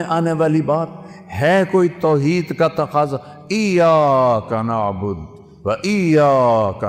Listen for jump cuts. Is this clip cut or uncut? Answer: uncut